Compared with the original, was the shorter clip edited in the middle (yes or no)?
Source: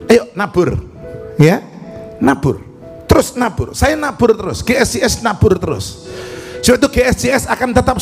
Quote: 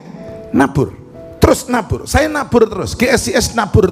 no